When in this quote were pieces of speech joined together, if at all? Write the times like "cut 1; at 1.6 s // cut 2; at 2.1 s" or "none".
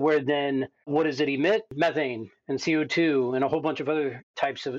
none